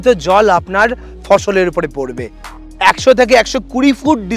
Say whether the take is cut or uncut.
cut